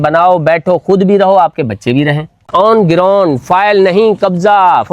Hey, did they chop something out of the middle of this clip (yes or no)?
yes